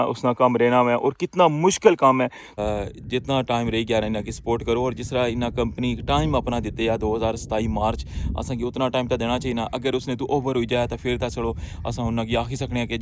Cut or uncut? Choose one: cut